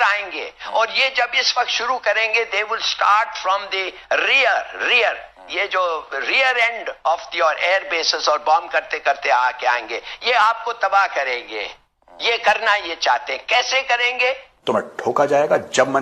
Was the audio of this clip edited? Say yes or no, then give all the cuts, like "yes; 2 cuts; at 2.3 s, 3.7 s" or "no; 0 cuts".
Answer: no; 0 cuts